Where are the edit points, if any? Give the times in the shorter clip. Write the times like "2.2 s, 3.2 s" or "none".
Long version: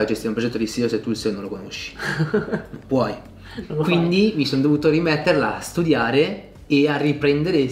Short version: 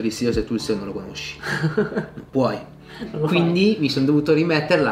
none